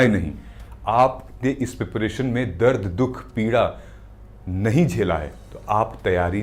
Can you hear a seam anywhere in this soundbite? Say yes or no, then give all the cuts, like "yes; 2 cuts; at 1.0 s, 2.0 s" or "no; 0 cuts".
no; 0 cuts